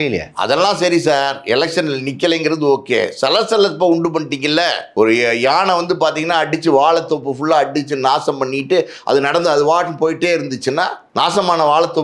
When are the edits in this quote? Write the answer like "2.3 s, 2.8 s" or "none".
4.8 s, 11.0 s